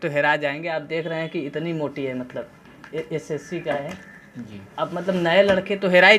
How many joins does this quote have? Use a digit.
0